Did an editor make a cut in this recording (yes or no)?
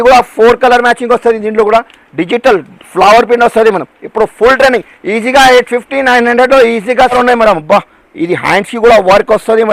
yes